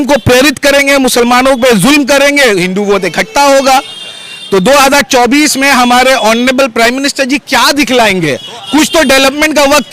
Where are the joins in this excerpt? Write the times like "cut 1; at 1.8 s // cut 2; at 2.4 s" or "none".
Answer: none